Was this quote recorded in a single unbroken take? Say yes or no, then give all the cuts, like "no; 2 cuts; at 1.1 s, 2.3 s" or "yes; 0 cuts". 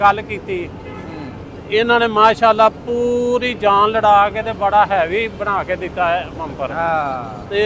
yes; 0 cuts